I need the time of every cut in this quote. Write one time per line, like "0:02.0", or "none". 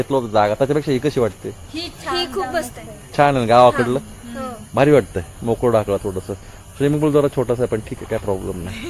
none